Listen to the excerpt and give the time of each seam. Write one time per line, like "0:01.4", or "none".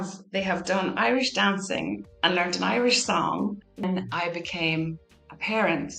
0:03.8